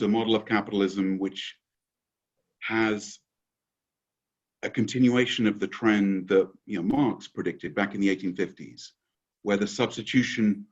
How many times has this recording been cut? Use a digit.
0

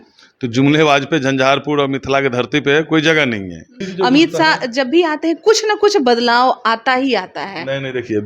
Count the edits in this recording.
1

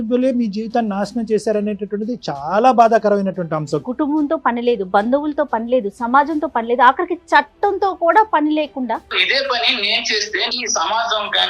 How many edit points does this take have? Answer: 3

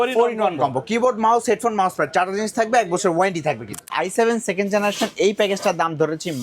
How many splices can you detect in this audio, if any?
1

